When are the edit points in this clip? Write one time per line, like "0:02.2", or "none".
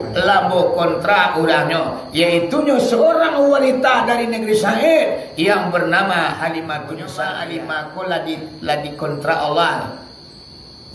0:07.1